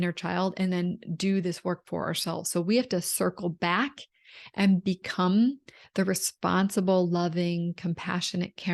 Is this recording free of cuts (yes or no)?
yes